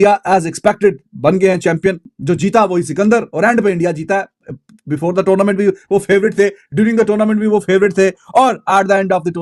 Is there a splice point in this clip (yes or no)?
no